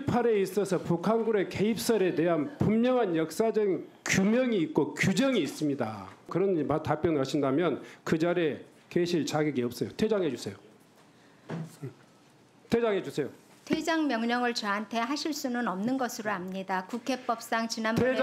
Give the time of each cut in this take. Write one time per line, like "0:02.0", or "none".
0:06.3